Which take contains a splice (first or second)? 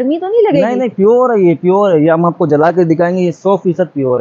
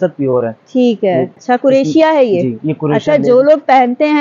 second